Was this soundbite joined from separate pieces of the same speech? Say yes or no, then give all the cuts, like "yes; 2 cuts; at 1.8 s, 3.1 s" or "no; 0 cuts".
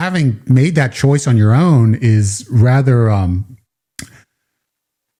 no; 0 cuts